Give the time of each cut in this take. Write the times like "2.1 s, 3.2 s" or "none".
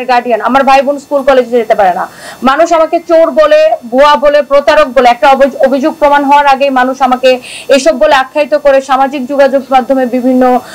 none